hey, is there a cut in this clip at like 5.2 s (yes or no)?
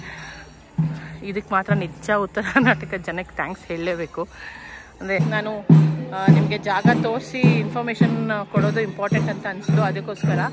yes